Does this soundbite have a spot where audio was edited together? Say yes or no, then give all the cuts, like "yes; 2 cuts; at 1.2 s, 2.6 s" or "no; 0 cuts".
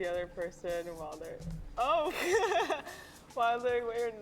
yes; 1 cut; at 2.2 s